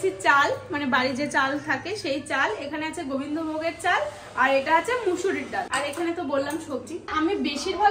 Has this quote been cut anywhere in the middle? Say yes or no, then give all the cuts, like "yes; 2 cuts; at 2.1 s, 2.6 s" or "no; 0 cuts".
yes; 2 cuts; at 5.7 s, 7.1 s